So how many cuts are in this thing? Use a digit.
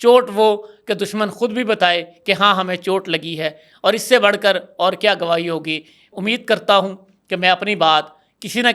0